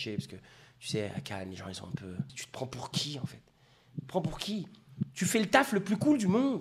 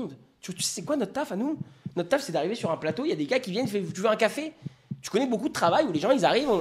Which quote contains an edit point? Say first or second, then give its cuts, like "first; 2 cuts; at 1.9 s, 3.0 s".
first; 1 cut; at 2.4 s